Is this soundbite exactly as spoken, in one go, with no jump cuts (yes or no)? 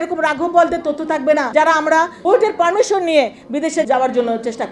no